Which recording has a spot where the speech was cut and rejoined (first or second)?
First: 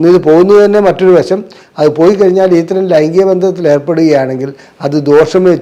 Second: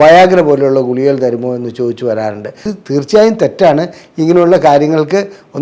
second